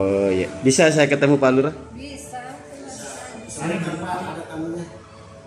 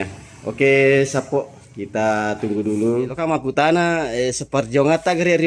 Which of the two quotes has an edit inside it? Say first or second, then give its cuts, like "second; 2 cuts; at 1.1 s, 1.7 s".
second; 1 cut; at 3.2 s